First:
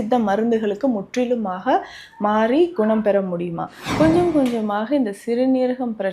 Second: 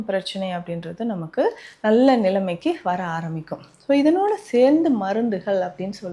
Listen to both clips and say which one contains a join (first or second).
first